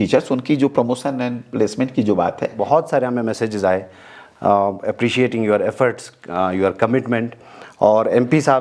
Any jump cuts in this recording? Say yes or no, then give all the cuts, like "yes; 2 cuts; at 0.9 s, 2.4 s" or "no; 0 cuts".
yes; 1 cut; at 2.6 s